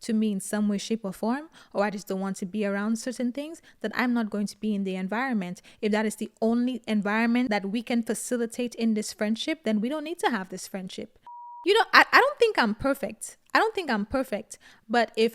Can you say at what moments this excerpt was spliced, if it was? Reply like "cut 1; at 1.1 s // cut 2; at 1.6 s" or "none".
cut 1; at 11.4 s